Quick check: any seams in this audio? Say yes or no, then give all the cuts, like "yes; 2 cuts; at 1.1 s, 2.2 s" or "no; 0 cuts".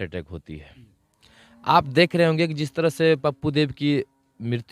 no; 0 cuts